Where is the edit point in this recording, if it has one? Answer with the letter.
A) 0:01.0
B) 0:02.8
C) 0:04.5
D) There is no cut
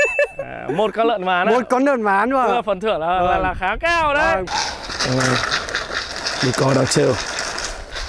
C